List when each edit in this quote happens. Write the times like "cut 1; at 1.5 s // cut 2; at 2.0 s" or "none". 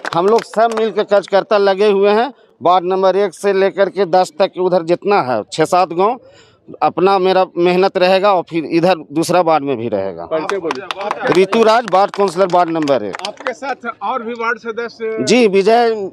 none